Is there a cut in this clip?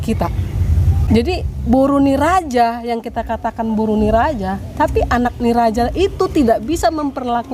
yes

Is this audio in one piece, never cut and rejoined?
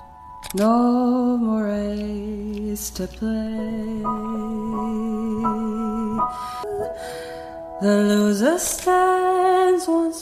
no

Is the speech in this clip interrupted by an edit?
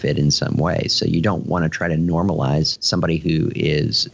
no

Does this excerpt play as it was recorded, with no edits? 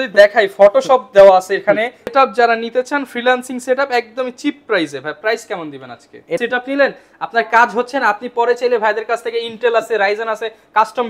no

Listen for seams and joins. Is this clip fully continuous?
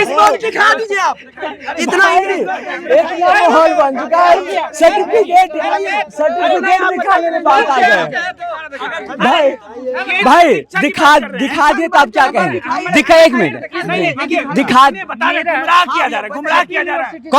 yes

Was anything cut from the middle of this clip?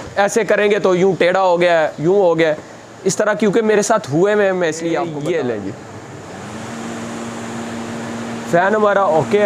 yes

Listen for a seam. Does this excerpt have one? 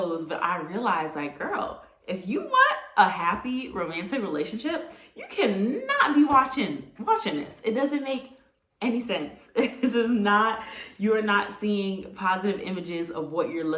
no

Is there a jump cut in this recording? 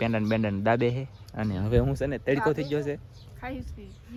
no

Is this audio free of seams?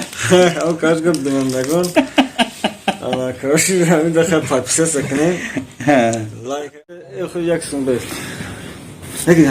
no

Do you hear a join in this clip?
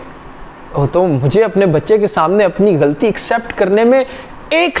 no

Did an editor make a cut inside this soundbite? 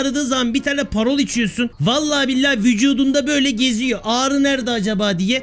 yes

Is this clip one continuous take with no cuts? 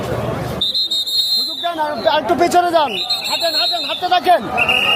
yes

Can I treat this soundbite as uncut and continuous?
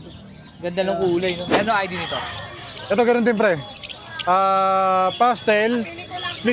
no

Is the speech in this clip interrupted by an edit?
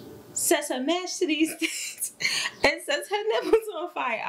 no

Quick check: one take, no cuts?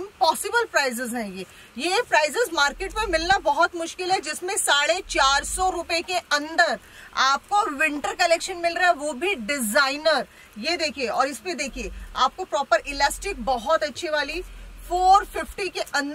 yes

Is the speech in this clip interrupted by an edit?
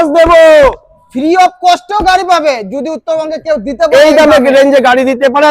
no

